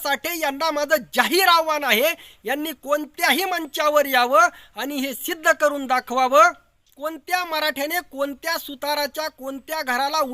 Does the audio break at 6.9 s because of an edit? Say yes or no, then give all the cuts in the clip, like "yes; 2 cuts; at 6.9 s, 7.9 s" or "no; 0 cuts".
yes; 1 cut; at 6.9 s